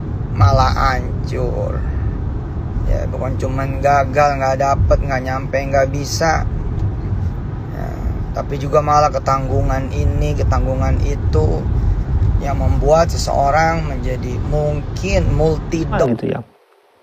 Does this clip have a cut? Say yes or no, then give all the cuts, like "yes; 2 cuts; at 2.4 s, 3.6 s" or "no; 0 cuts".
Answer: yes; 1 cut; at 16.0 s